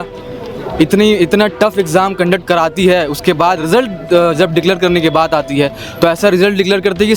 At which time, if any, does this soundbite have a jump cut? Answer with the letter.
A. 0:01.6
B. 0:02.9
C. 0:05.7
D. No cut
D